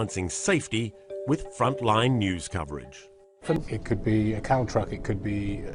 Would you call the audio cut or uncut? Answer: cut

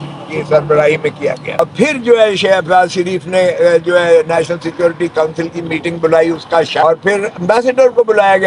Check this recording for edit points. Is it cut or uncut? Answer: cut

